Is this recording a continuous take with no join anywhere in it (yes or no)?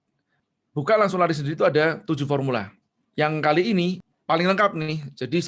no